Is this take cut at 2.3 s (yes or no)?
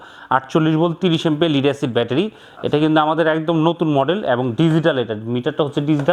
no